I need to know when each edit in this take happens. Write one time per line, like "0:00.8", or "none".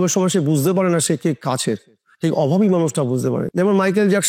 none